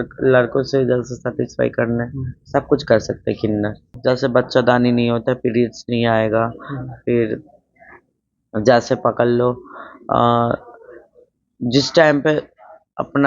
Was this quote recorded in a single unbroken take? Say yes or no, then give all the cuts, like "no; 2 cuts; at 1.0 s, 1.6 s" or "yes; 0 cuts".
no; 1 cut; at 3.8 s